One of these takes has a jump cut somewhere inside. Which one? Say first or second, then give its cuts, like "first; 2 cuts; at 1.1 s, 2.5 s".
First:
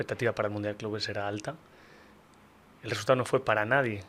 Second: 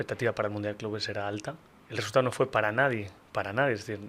second; 1 cut; at 1.7 s